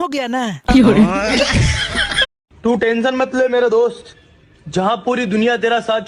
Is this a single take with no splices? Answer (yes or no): yes